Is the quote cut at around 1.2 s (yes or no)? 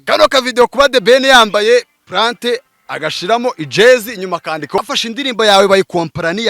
no